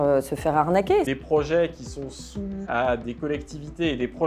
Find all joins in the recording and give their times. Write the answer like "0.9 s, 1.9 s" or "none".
1.1 s, 2.6 s